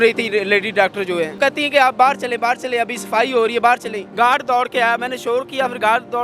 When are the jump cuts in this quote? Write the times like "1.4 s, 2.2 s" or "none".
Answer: 1.3 s, 4.0 s